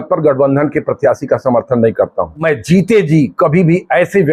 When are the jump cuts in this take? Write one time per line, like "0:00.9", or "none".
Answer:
0:02.4

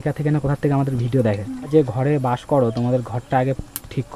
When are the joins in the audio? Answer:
0:01.7

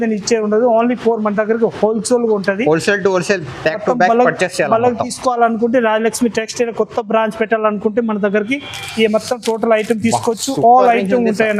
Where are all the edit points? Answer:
none

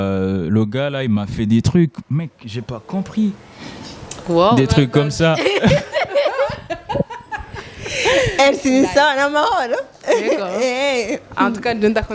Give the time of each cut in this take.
none

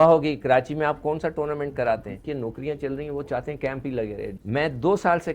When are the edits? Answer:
0:02.2
0:04.3

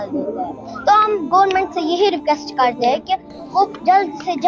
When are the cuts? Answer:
none

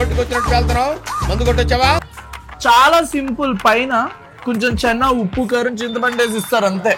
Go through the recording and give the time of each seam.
none

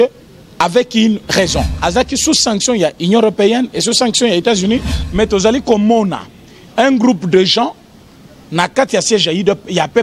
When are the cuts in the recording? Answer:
0:01.7
0:05.0

